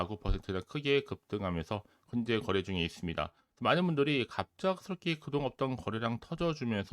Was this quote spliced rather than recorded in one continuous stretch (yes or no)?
yes